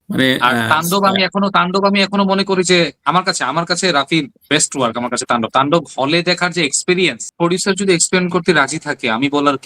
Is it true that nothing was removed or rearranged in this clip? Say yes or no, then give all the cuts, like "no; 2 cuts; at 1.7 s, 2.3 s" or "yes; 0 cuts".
no; 1 cut; at 7.2 s